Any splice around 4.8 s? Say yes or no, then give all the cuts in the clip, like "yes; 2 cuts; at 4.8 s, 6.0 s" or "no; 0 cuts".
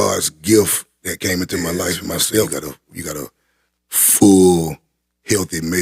no; 1 cut; at 2.5 s